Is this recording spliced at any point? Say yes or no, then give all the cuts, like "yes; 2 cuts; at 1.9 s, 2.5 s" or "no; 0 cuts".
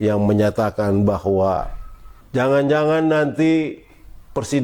no; 0 cuts